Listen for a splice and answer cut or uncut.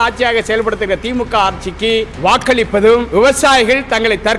cut